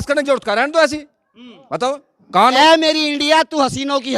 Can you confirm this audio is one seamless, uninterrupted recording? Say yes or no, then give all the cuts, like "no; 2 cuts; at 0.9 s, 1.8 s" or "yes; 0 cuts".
no; 1 cut; at 2.5 s